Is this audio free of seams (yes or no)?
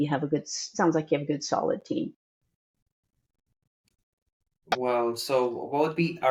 yes